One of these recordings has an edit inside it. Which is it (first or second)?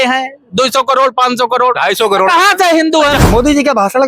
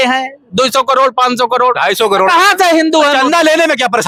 first